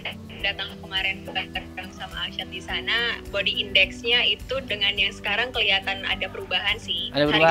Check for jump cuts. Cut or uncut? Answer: uncut